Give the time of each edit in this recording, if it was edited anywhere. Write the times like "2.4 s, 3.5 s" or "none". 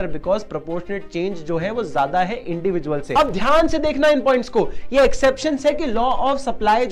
3.1 s

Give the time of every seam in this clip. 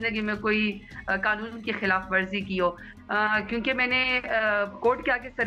2.9 s

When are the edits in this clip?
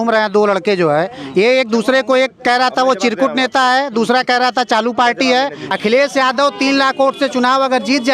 5.6 s

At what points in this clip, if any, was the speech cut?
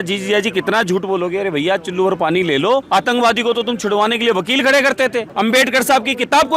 2.9 s, 5.2 s

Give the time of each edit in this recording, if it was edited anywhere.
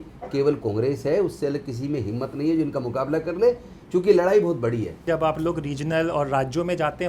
5.0 s

